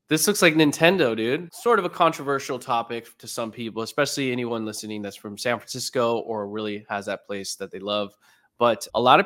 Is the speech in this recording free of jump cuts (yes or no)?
no